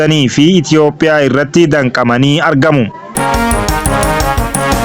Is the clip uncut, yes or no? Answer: no